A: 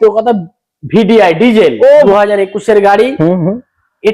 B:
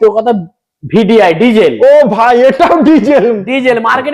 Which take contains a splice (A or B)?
A